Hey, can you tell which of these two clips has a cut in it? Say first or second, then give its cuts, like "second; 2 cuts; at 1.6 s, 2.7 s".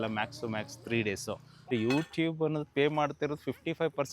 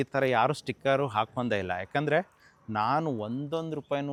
first; 1 cut; at 1.7 s